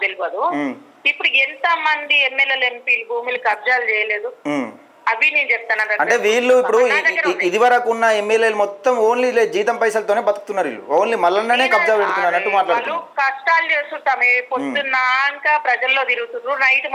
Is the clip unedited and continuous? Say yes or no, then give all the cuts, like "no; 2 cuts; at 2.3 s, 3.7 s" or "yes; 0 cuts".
yes; 0 cuts